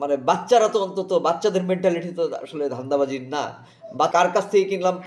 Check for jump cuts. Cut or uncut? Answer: cut